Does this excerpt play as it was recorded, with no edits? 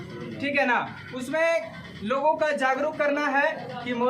yes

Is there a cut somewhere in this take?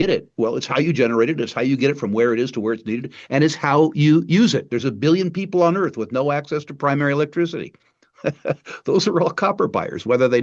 no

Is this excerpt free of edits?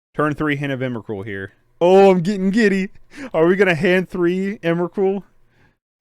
no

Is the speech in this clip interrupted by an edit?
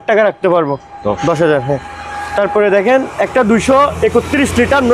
no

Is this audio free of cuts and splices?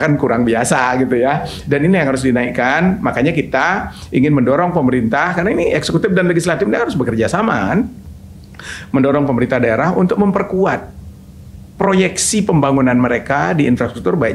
yes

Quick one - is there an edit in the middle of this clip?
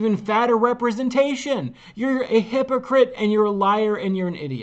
no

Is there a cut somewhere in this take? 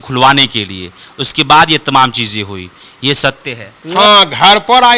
yes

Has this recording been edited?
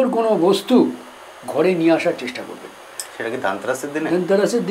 no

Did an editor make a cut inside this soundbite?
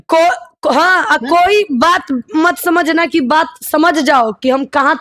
no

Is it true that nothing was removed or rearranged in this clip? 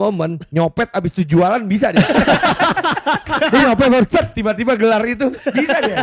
yes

